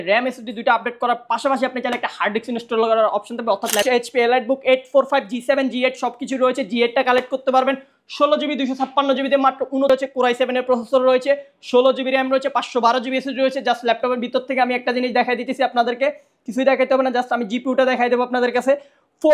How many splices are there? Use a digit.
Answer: 2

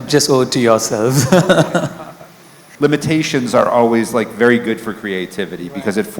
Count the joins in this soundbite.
1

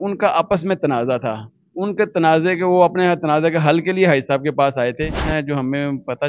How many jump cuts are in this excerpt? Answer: 1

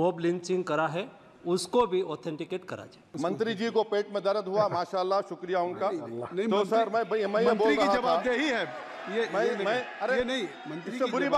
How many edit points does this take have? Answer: 1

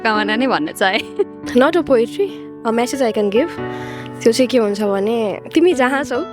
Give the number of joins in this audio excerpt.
1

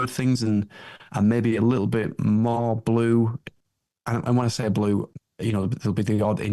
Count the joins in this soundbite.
1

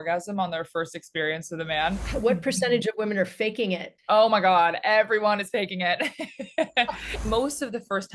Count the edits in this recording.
3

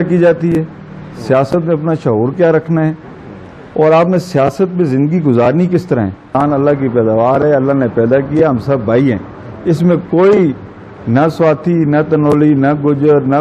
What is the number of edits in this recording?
1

